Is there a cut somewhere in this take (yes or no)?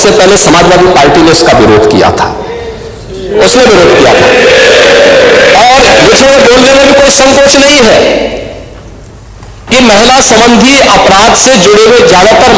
no